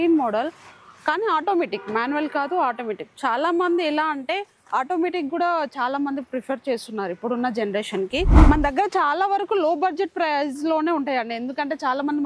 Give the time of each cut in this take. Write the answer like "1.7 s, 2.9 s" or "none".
8.3 s